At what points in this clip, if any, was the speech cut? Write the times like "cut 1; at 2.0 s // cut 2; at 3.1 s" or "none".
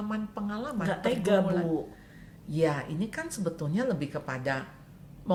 none